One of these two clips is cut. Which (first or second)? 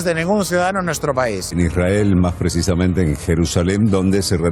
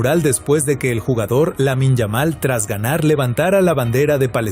first